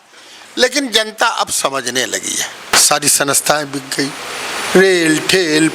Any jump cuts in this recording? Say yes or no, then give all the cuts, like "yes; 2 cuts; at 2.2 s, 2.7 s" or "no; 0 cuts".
yes; 1 cut; at 2.7 s